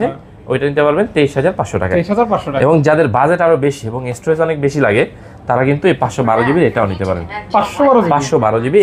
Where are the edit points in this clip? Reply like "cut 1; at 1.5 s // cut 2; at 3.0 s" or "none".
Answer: none